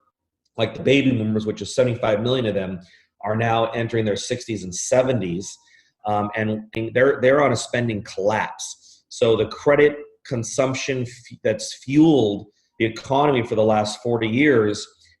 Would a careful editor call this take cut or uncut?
cut